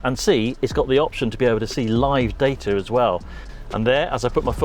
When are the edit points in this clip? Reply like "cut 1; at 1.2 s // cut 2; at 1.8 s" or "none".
cut 1; at 3.4 s